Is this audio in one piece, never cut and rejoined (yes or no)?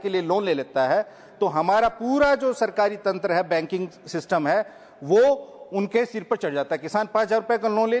yes